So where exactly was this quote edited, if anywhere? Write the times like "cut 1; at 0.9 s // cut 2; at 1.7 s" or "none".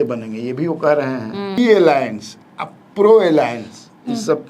cut 1; at 1.6 s